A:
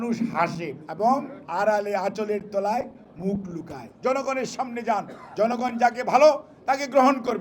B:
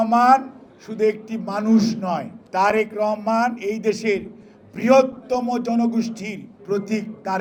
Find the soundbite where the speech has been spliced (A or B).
A